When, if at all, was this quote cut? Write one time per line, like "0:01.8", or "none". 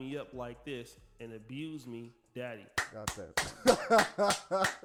none